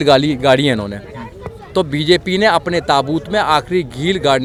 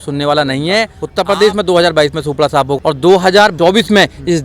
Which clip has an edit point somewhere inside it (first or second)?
second